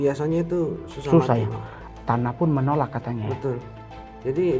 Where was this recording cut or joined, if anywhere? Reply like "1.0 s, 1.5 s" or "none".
1.8 s